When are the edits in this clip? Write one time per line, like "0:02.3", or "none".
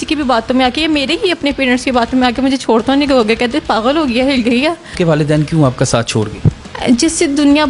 0:04.9
0:06.7